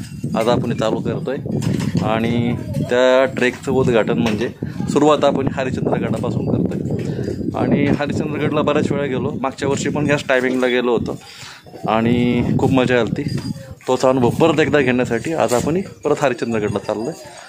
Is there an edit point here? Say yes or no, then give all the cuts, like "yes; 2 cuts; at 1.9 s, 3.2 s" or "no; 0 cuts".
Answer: no; 0 cuts